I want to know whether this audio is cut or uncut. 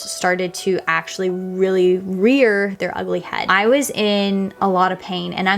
cut